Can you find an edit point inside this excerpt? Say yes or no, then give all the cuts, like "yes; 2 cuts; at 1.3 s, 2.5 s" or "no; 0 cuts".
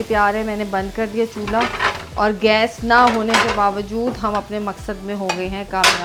no; 0 cuts